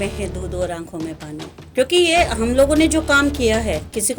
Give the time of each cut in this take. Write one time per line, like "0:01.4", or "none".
0:01.7